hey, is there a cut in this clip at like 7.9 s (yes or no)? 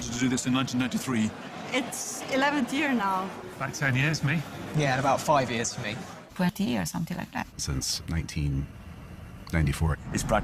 no